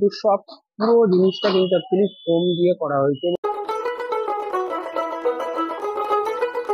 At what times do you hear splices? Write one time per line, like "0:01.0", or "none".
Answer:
0:03.3